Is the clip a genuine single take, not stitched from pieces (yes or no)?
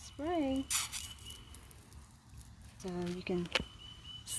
no